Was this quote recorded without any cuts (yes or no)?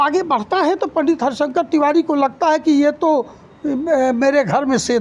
yes